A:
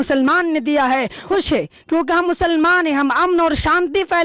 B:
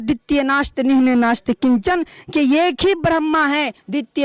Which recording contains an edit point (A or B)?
A